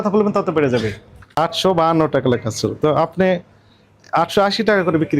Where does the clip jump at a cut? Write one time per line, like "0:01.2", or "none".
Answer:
0:01.2